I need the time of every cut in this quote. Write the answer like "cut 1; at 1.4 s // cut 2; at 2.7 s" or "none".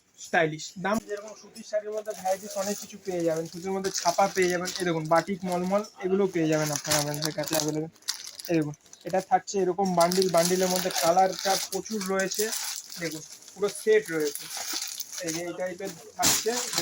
cut 1; at 1.0 s